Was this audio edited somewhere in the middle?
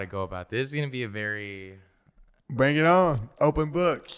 yes; 1 cut; at 3.3 s

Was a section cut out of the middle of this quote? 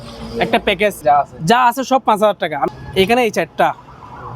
yes; 2 cuts; at 1.0 s, 2.7 s

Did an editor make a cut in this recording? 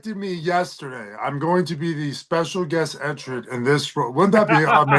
no; 0 cuts

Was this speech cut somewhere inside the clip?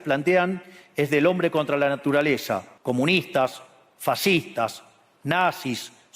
yes; 1 cut; at 2.7 s

